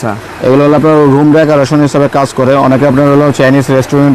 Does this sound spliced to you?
no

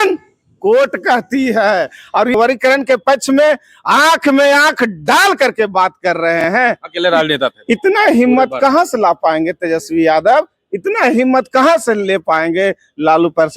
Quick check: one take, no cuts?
no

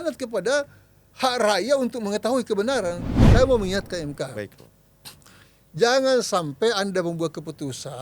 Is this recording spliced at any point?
yes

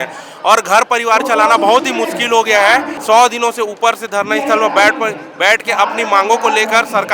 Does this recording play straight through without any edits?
no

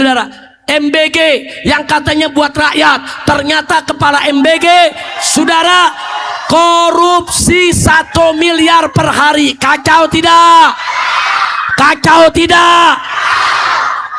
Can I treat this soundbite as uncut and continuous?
yes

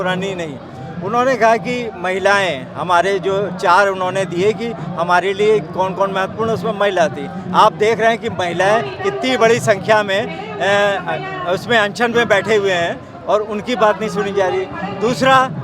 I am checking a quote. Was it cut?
no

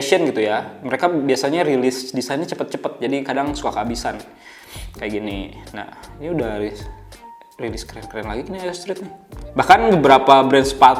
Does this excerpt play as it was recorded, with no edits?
yes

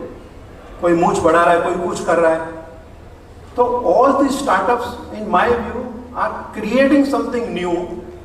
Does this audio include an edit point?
no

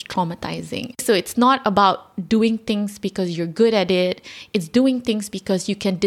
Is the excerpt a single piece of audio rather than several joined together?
no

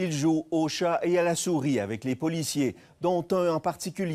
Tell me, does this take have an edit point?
no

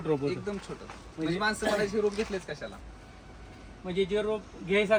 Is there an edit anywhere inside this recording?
no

